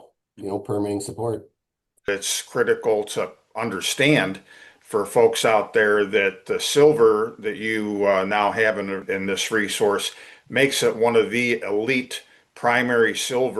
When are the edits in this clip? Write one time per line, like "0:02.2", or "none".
0:02.1
0:09.0